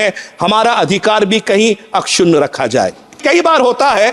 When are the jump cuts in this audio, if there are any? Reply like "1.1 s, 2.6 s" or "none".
3.2 s